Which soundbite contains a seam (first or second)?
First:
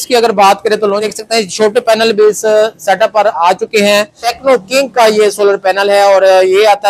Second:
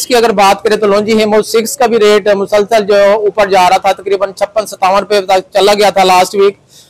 first